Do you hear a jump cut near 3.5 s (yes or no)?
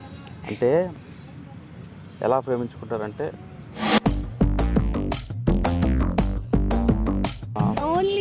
no